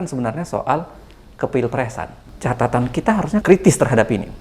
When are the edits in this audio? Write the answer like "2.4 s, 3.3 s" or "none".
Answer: 2.2 s, 3.4 s